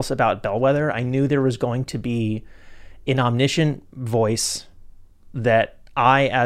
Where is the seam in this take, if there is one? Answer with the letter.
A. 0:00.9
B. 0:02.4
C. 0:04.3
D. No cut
D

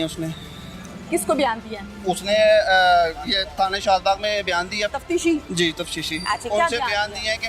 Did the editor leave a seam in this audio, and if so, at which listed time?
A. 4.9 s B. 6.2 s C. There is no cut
A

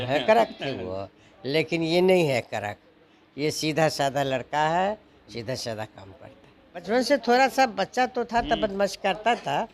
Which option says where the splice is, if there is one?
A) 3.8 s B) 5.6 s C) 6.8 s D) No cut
C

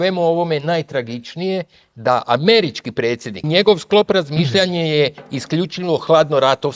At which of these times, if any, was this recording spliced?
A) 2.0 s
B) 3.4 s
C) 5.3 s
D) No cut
B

